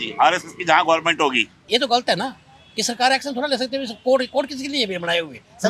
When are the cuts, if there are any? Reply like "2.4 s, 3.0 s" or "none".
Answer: 1.6 s